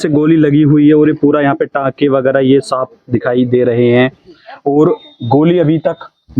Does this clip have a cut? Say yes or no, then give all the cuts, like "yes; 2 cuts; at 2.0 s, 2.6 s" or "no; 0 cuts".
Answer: no; 0 cuts